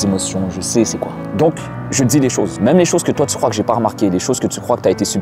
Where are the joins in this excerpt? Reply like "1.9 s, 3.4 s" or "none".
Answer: 1.2 s, 2.5 s